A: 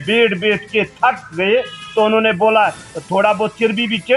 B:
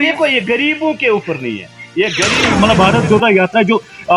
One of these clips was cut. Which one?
B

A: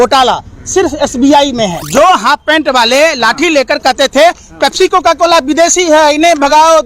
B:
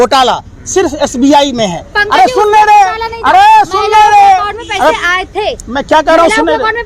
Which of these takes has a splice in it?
A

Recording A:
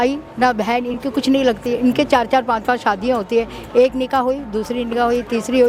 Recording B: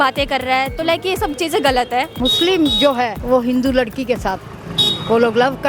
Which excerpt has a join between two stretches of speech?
B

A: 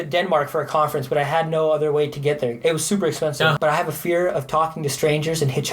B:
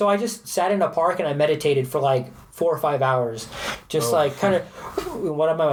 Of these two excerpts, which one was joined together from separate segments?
A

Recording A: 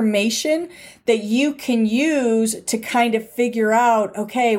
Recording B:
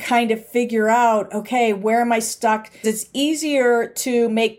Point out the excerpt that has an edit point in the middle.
B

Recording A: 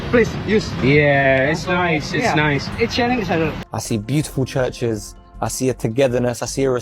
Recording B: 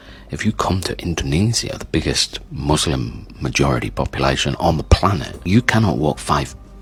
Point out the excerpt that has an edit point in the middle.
A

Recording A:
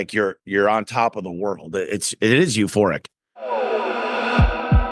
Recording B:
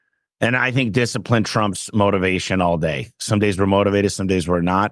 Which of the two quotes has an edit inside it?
A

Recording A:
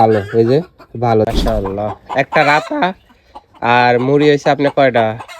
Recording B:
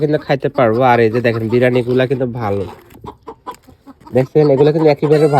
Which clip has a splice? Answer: A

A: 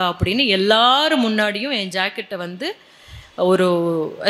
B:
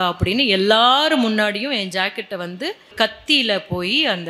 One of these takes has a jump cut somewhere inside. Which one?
B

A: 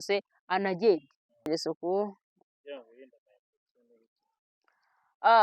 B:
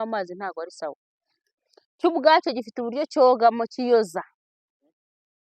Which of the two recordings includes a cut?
A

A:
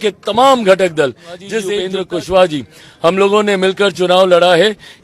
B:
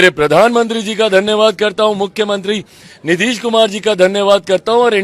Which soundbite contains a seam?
A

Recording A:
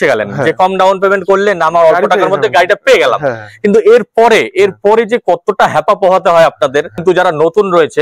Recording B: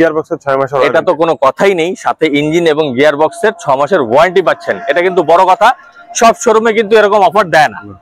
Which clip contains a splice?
A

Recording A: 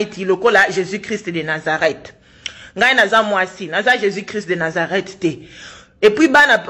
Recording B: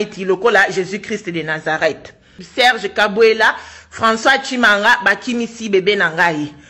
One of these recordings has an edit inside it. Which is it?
B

